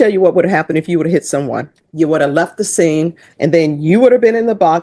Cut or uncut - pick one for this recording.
cut